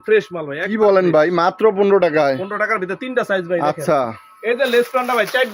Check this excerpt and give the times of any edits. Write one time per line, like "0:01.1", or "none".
none

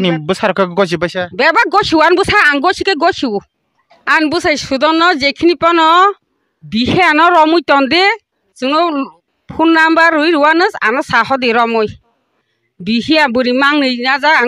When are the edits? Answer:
none

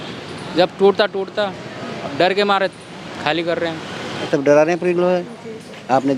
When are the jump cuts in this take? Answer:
0:04.3

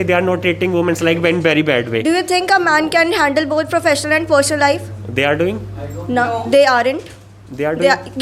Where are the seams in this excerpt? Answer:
none

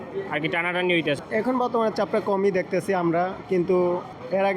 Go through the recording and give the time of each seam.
0:01.2

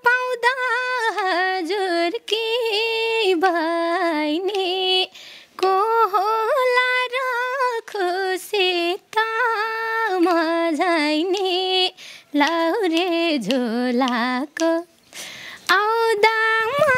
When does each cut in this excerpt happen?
none

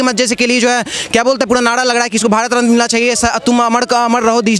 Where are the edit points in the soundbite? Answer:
none

